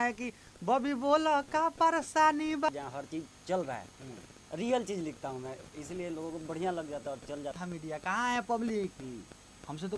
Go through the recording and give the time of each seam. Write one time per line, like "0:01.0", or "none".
0:02.7
0:07.6